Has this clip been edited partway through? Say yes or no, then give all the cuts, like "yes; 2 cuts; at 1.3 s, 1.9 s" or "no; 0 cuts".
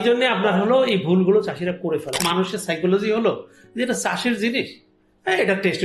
yes; 1 cut; at 2.2 s